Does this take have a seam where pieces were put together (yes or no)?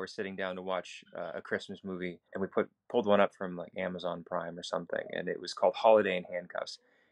yes